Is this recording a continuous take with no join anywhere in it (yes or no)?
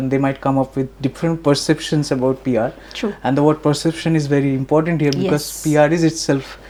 yes